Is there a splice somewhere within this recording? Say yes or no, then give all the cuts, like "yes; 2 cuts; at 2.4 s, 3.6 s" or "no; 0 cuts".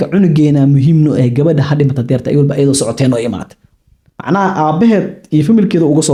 no; 0 cuts